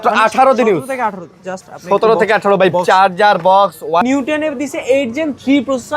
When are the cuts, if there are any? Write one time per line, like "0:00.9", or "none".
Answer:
0:04.0

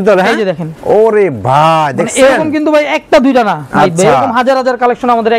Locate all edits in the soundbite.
none

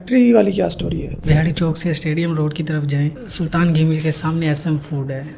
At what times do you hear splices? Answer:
0:01.1

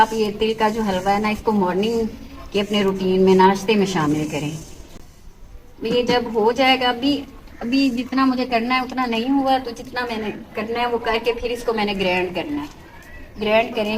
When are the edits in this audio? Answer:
none

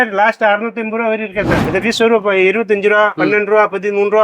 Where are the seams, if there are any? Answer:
0:01.6

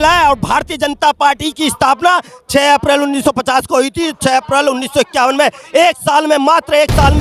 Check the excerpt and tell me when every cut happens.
none

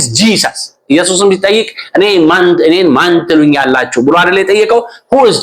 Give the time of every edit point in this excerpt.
none

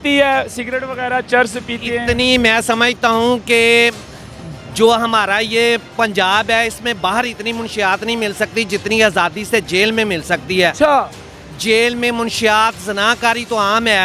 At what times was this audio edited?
none

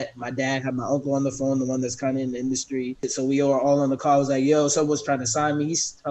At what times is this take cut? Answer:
0:03.0

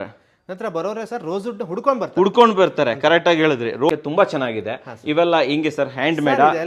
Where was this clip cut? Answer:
0:03.9

